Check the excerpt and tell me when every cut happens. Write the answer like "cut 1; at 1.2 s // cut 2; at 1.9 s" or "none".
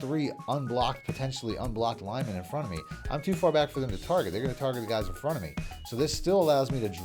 none